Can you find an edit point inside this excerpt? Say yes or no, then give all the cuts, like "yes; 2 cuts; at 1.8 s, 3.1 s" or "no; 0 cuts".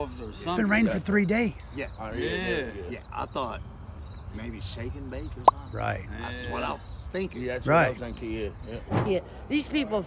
yes; 2 cuts; at 3.0 s, 9.0 s